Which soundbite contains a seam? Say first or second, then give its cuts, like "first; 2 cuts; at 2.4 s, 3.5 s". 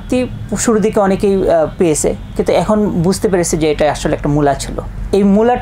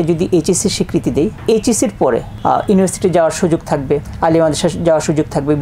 second; 1 cut; at 4.1 s